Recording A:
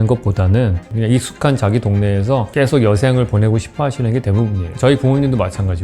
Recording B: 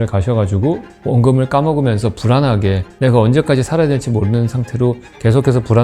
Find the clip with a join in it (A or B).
A